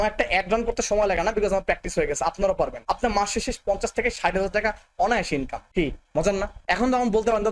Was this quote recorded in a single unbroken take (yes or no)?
no